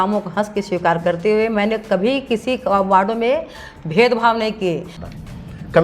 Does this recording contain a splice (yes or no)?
yes